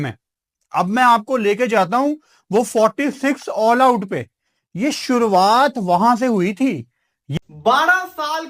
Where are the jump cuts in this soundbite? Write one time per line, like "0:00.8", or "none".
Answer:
0:07.4

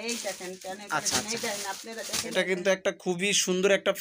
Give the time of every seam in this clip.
0:02.3

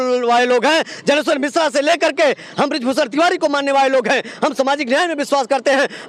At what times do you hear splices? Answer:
none

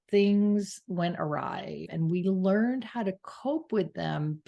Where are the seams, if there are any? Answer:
0:01.8

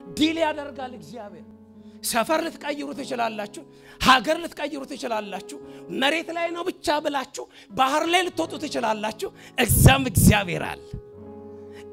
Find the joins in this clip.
none

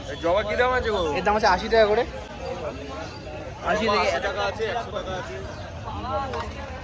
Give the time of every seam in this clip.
none

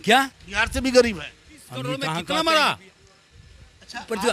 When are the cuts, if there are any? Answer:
0:02.1

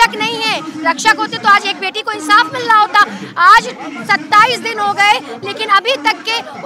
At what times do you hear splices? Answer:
none

